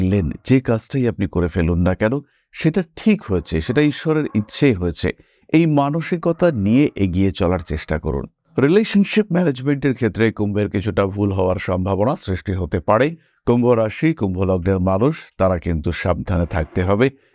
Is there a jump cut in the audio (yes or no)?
no